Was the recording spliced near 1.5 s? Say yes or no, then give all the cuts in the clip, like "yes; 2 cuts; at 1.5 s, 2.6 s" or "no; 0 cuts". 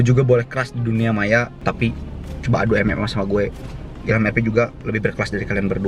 yes; 1 cut; at 1.5 s